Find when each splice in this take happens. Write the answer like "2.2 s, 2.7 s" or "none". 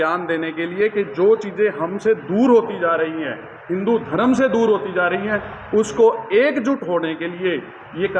none